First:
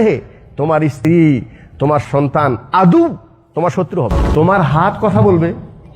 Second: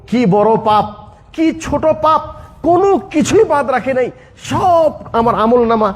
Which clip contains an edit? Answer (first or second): first